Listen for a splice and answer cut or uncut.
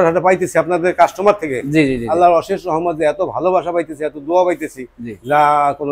uncut